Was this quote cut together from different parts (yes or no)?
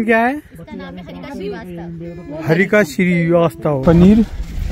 yes